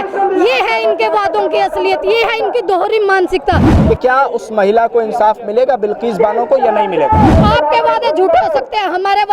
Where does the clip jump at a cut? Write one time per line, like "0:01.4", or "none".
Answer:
0:03.7
0:07.4